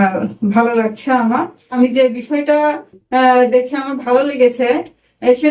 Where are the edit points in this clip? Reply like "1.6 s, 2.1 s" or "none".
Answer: 1.7 s